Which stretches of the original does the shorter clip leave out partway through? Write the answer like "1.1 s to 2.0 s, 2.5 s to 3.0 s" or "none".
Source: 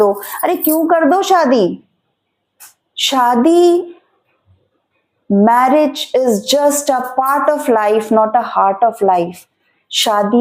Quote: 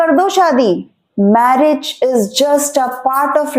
1.9 s to 5.1 s